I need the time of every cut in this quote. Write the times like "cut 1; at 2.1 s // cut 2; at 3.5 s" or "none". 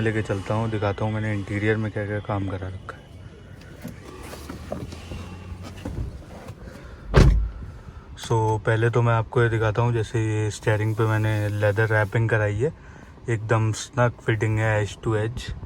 none